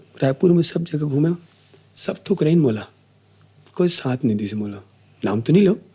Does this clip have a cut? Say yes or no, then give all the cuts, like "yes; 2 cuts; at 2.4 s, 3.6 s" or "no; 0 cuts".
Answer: no; 0 cuts